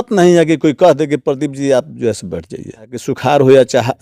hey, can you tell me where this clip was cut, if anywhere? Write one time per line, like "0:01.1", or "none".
0:03.0